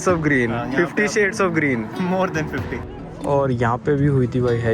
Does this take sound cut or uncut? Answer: cut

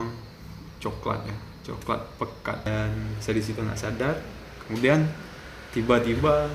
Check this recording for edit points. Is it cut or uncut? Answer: cut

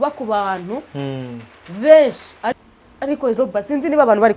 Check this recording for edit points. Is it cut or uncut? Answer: cut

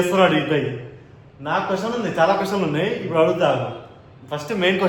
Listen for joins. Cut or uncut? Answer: uncut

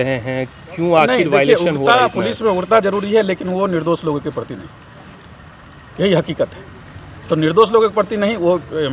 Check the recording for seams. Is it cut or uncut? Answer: uncut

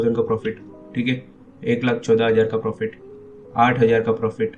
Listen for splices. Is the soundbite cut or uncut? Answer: uncut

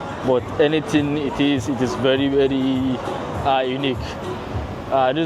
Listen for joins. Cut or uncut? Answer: uncut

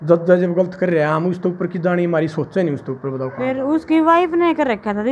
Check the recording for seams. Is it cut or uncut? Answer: cut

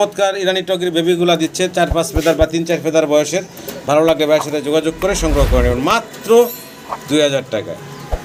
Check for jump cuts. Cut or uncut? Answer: uncut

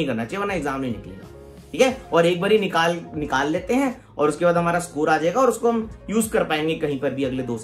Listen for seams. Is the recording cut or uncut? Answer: uncut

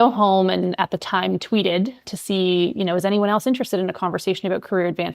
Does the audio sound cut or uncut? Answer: cut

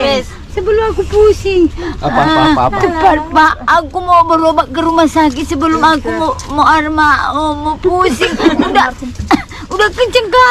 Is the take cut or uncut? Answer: uncut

